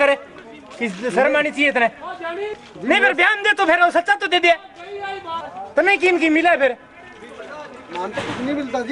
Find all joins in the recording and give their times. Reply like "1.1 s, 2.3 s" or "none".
2.5 s, 5.5 s